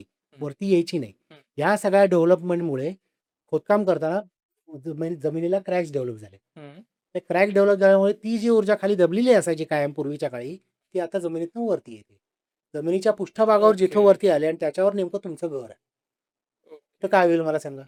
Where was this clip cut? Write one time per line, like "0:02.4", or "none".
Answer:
none